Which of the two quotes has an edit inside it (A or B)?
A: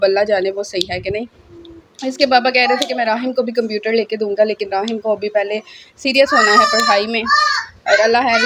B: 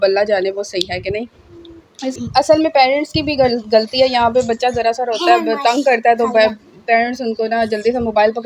B